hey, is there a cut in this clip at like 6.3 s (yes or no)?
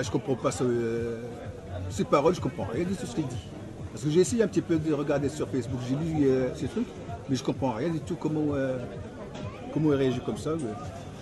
yes